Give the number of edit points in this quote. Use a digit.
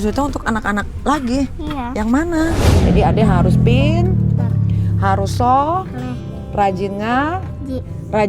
1